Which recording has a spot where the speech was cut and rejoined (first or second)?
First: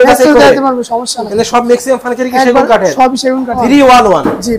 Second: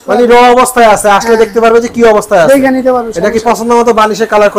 first